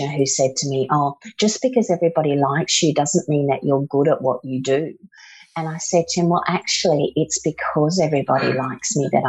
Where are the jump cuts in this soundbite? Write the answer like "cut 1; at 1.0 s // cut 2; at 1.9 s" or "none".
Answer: none